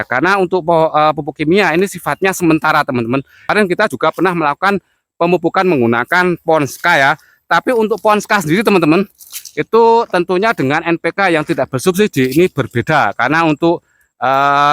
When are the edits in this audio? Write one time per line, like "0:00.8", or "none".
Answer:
0:03.5